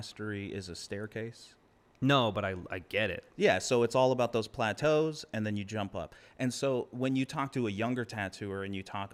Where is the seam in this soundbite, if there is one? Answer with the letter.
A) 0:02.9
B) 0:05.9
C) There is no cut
C